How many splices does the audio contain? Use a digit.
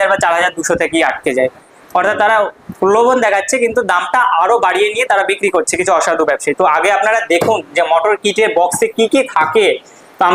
1